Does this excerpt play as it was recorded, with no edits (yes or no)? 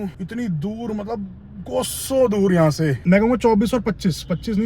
no